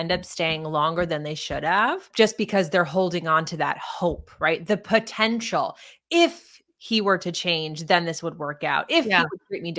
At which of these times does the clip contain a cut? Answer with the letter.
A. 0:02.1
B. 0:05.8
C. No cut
A